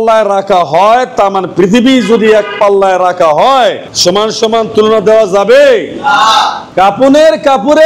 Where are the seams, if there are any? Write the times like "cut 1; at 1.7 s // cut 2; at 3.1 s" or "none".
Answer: cut 1; at 6.6 s